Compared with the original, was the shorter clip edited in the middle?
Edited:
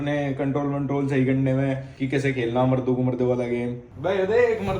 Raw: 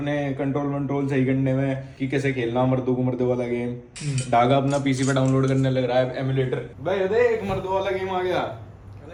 yes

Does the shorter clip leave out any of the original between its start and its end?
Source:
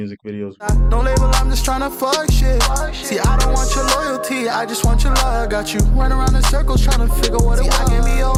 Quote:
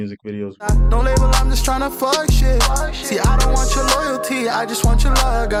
no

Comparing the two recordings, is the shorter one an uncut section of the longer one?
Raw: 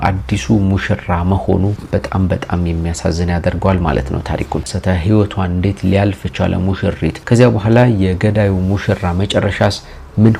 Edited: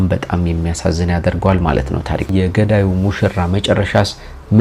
no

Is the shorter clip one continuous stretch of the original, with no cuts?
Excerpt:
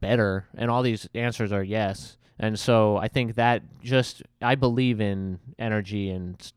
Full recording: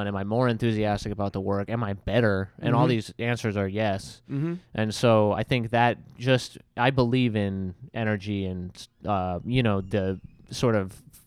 no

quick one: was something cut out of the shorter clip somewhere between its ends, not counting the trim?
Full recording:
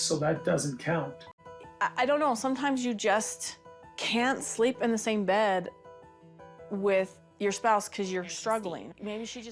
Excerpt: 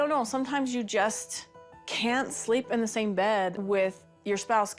yes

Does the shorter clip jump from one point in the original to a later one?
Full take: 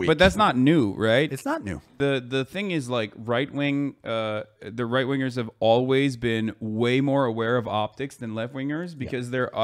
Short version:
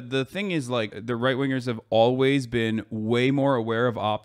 yes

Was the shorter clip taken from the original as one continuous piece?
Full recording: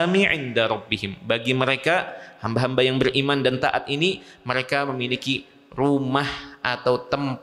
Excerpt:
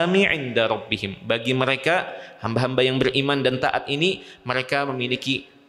yes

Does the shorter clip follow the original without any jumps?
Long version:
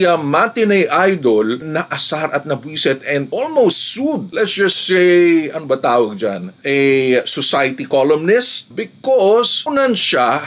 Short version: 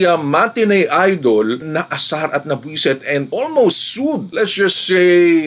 yes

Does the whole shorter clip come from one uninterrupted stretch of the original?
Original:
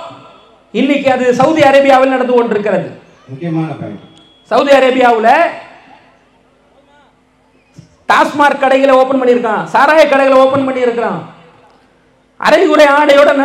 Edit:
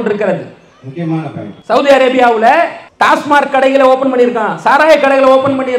no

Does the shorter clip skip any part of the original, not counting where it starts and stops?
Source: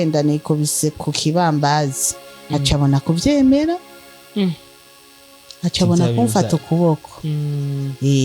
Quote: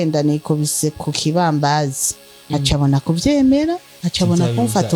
yes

